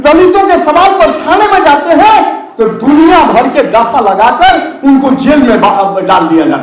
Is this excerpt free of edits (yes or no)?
yes